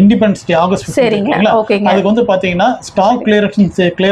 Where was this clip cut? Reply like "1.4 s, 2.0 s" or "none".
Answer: none